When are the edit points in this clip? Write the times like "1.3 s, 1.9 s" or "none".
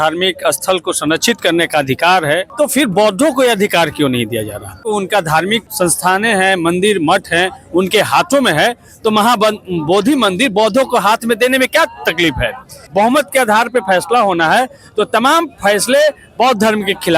2.5 s, 4.8 s, 5.7 s, 12.8 s